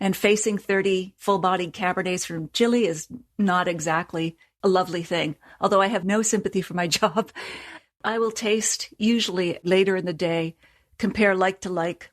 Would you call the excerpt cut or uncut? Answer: cut